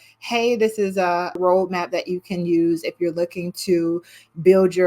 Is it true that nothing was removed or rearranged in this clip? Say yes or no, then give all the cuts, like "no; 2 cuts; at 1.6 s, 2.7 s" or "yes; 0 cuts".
no; 1 cut; at 1.4 s